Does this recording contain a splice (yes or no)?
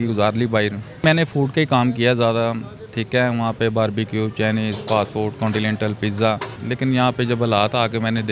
yes